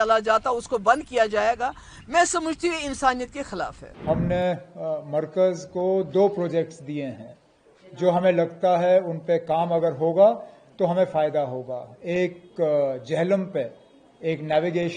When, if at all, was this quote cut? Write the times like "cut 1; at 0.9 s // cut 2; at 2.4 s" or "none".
cut 1; at 3.9 s